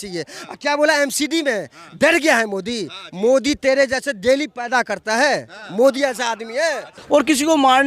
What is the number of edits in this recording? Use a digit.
1